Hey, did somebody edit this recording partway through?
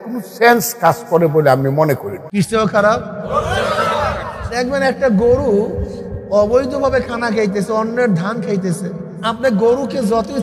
yes; 2 cuts; at 4.6 s, 9.1 s

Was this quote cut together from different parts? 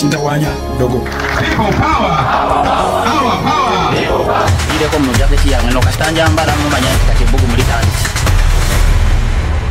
no; 0 cuts

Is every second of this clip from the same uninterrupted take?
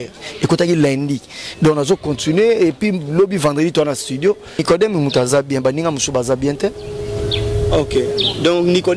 no; 1 cut; at 4.6 s

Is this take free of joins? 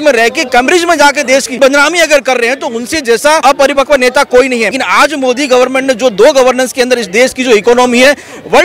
no; 3 cuts; at 1.6 s, 3.4 s, 4.7 s

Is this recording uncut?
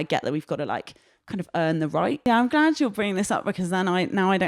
no; 1 cut; at 2.3 s

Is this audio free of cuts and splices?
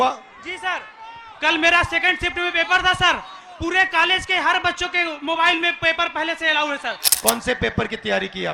no; 1 cut; at 7.2 s

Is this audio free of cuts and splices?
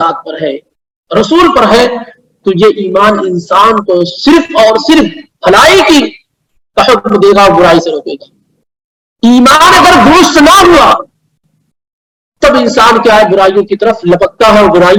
yes; 0 cuts

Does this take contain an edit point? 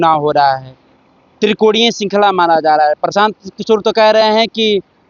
no; 0 cuts

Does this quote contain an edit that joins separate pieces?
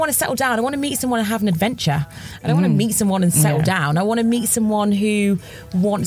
no; 0 cuts

